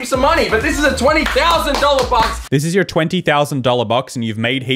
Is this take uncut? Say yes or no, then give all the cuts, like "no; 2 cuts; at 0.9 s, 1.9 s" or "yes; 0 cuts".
no; 1 cut; at 2.4 s